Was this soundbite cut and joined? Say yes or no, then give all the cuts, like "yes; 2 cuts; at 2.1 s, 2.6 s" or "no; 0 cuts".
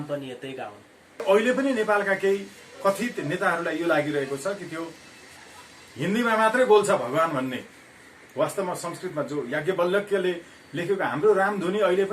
yes; 1 cut; at 1.2 s